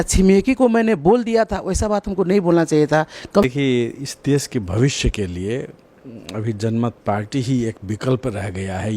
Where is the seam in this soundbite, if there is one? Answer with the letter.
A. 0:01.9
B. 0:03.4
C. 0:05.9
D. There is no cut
B